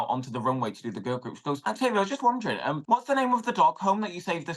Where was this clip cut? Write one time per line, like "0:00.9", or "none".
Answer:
0:01.6
0:02.8